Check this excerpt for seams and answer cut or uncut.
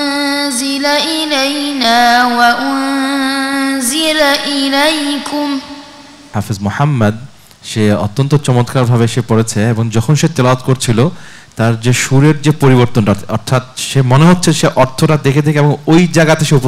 cut